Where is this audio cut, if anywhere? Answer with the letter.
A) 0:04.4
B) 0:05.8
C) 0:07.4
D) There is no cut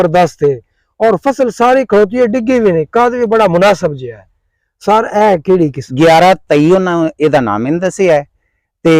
B